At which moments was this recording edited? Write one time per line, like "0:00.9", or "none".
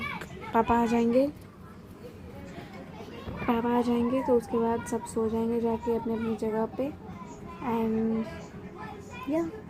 none